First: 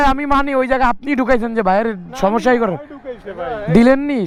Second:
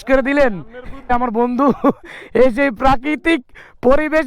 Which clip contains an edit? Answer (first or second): second